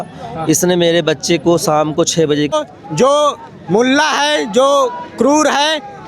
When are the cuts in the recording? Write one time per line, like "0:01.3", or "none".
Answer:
0:02.5